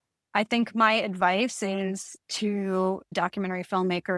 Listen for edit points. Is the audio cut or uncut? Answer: cut